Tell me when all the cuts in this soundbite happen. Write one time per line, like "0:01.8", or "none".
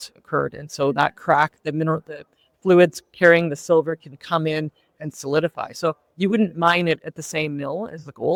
none